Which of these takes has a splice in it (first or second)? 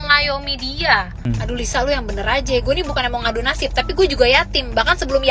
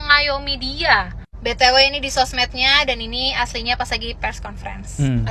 first